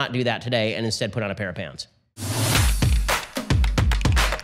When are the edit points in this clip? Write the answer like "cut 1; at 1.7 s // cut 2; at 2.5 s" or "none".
cut 1; at 2.4 s